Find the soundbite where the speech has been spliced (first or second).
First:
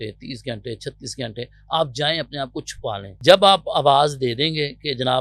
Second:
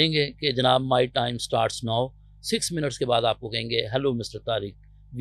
first